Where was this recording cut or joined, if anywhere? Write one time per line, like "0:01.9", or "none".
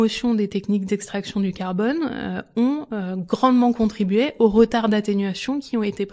none